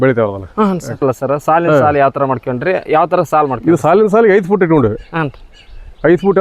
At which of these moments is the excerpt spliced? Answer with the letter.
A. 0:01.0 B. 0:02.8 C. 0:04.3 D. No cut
A